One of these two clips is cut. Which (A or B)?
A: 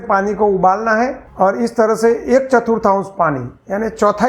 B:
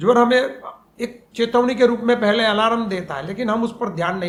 A